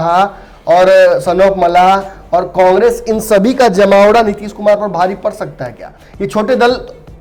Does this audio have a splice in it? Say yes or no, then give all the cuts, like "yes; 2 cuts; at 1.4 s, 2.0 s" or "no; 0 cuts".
no; 0 cuts